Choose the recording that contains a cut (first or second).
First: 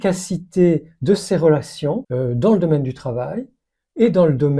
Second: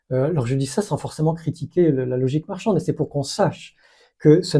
first